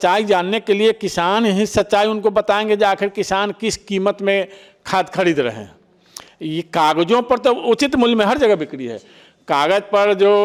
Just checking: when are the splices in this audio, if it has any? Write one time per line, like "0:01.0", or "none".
none